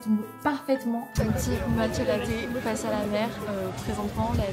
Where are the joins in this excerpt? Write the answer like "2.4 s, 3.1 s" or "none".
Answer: 1.1 s